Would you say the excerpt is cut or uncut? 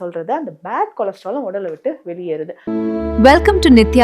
cut